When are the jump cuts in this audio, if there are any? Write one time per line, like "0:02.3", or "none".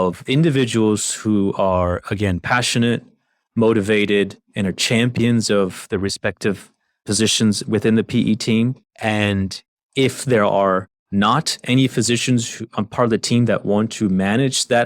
0:08.9
0:11.0